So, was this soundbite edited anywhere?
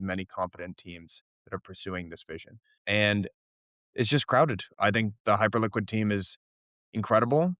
yes; 2 cuts; at 2.8 s, 4.7 s

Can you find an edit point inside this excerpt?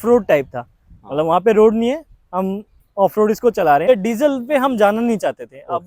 yes; 1 cut; at 3.9 s

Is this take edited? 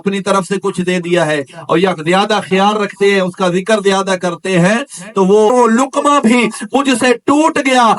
yes; 1 cut; at 5.5 s

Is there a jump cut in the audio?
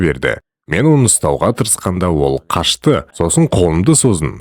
no; 0 cuts

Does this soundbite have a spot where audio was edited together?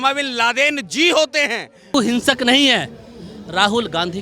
yes; 1 cut; at 1.9 s

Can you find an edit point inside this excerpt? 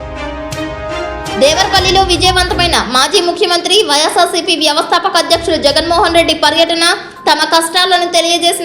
yes; 1 cut; at 1.3 s

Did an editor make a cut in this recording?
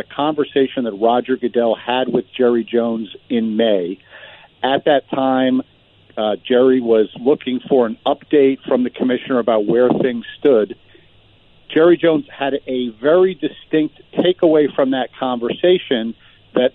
no; 0 cuts

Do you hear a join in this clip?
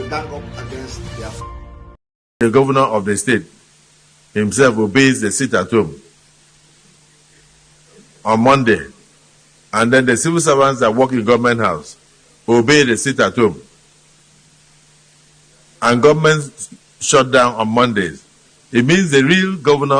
yes; 1 cut; at 2.3 s

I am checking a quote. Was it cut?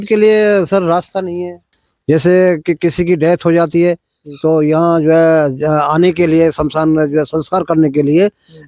no; 0 cuts

